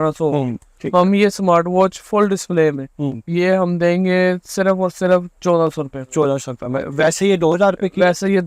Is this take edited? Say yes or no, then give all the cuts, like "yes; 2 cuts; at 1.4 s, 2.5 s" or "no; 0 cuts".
no; 0 cuts